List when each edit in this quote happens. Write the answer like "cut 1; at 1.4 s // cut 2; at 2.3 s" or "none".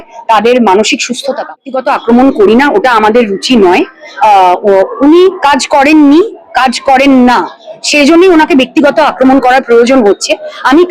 cut 1; at 1.6 s